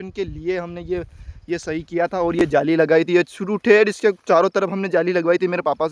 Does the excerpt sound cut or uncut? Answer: uncut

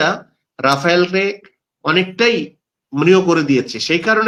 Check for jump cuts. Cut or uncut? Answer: uncut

